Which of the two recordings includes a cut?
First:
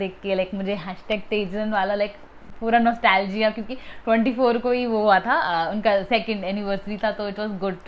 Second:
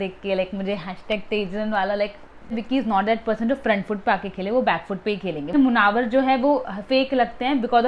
second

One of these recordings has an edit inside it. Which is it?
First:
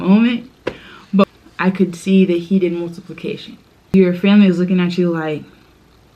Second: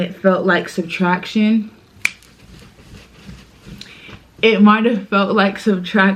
first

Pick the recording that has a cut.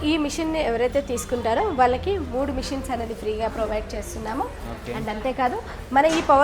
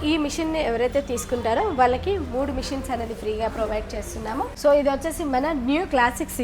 second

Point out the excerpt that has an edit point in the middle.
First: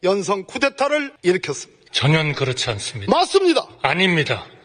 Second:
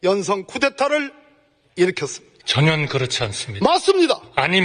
first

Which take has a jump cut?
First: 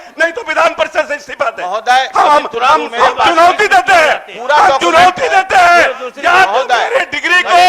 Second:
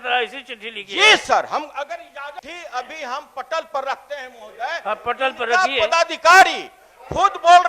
second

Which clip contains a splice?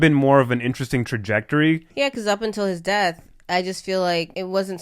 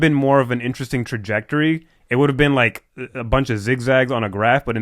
first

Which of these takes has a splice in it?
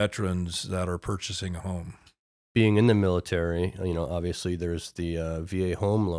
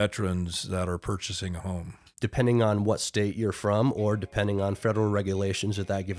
second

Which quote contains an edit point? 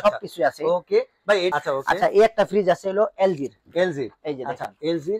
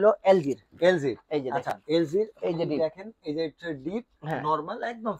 first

